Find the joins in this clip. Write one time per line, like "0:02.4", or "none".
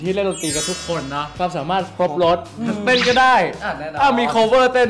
0:01.3